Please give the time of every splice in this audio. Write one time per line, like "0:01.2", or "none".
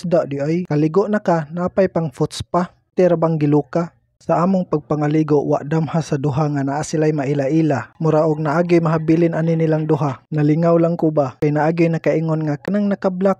none